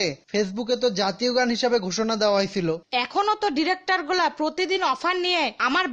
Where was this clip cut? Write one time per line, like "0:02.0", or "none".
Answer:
0:02.8

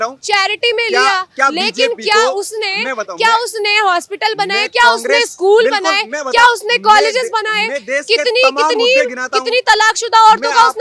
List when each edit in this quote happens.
none

